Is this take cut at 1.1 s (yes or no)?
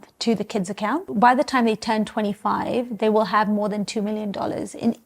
yes